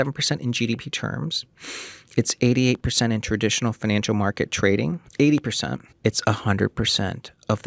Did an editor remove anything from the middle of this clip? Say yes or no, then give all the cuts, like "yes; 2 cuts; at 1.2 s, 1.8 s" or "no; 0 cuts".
yes; 2 cuts; at 5.0 s, 5.9 s